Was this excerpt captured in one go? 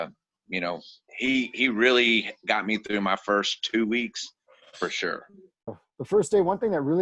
no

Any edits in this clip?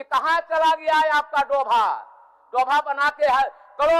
no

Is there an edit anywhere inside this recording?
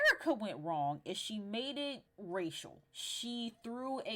yes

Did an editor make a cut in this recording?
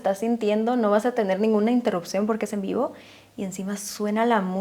no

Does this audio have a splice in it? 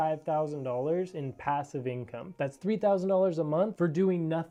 no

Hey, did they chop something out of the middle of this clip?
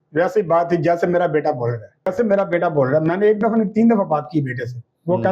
yes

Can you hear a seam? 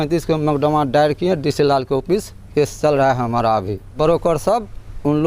yes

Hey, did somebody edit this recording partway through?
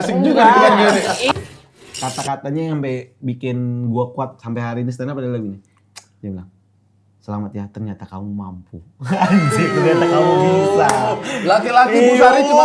yes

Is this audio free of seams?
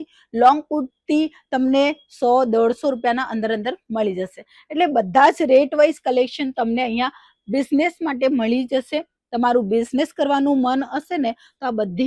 yes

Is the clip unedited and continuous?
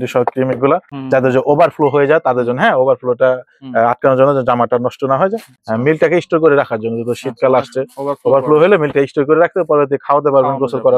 no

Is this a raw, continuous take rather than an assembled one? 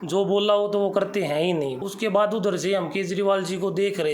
no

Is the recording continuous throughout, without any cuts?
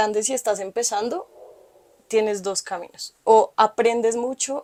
yes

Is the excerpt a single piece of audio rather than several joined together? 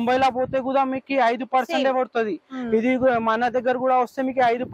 yes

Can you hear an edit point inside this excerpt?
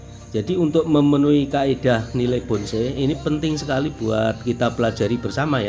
no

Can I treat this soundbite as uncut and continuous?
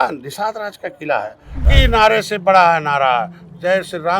no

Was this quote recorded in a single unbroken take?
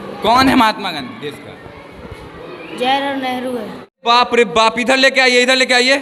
no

